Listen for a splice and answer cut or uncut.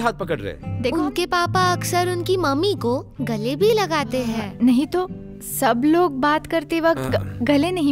cut